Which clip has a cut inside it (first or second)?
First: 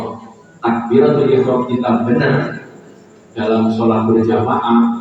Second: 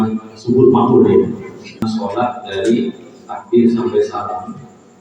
second